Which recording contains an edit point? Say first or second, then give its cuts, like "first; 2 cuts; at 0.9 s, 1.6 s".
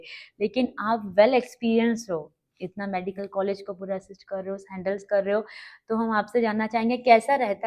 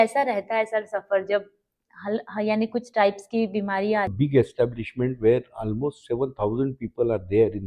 second; 1 cut; at 4.1 s